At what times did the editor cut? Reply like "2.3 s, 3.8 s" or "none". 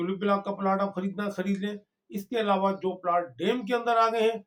none